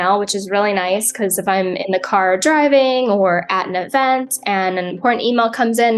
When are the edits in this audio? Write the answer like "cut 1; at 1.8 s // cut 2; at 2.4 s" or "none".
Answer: none